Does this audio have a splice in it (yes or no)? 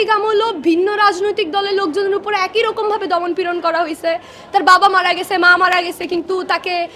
no